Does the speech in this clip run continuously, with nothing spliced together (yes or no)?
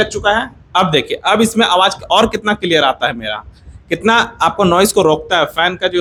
yes